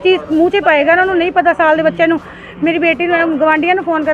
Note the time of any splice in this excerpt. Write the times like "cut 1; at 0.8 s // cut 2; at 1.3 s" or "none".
none